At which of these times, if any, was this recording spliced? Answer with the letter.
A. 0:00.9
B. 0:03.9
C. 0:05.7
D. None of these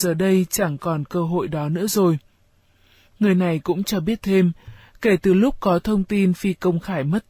C